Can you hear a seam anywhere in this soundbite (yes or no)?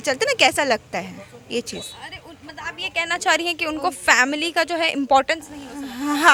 no